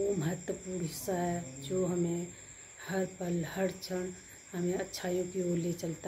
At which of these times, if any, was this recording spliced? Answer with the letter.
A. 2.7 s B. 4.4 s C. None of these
C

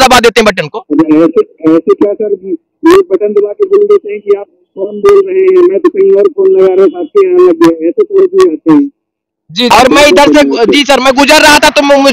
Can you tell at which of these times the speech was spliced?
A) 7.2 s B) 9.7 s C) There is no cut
B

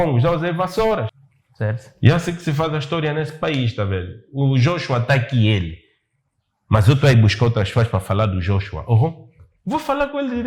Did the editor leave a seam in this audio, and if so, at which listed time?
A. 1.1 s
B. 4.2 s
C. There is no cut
A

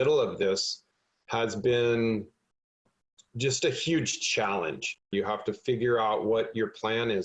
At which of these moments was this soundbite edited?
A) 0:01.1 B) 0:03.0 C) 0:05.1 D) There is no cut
C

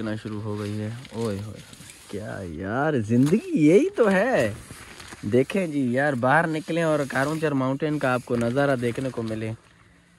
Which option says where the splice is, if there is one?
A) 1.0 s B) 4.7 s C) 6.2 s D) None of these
D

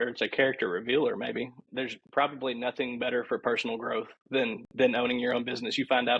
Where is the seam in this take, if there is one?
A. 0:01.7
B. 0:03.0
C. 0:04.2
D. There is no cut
A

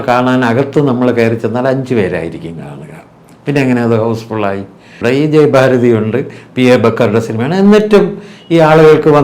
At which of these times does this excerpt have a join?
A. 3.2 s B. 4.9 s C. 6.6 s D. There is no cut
B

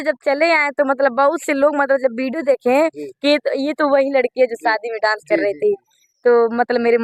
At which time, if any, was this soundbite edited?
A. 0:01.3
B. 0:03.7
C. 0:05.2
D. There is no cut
D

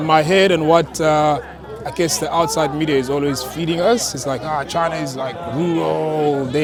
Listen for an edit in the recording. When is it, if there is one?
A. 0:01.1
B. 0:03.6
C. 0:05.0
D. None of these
D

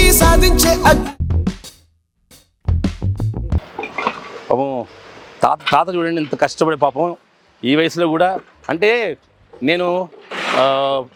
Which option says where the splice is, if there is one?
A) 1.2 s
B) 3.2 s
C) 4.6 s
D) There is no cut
D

